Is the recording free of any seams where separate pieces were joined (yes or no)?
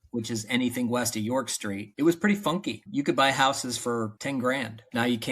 no